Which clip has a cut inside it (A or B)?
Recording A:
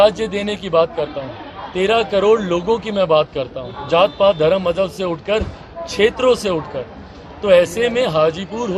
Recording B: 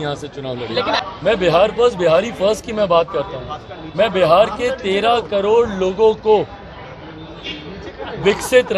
B